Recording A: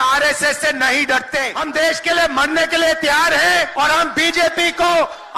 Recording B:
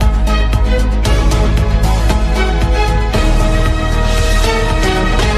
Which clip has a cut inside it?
A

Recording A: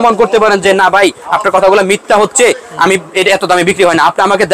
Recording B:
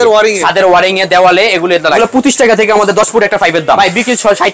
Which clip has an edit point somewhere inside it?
B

